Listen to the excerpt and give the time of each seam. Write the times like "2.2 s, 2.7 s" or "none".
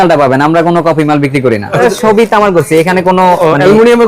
1.8 s